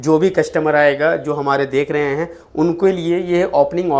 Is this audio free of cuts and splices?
yes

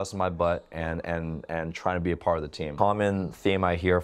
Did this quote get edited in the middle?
yes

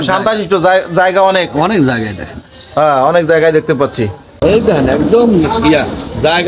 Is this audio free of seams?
no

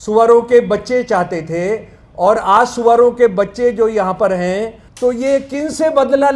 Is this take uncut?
no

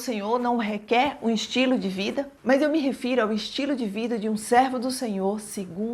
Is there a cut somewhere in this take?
yes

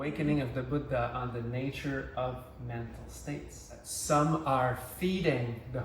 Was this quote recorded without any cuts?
no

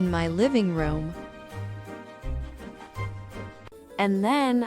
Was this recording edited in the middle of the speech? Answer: yes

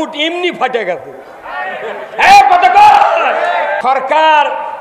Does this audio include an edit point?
yes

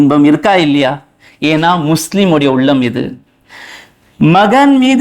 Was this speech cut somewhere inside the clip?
no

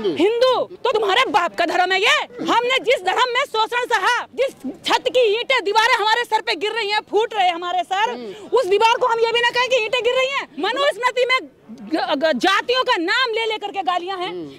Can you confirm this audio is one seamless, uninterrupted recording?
no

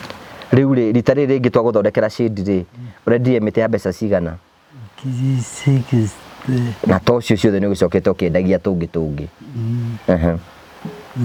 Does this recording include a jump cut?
no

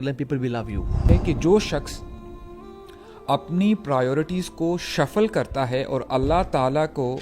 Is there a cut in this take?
yes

